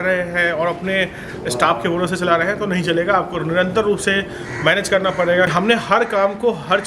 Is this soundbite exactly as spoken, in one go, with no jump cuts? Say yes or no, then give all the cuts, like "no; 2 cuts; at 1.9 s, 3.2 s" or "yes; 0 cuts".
no; 1 cut; at 5.5 s